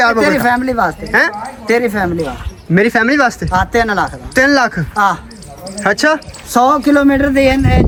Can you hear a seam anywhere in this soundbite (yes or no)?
no